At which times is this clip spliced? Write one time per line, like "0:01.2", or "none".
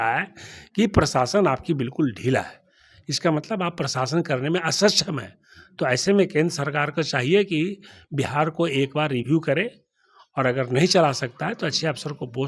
none